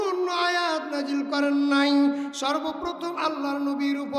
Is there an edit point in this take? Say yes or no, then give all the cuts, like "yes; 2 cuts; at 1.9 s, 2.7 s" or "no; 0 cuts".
no; 0 cuts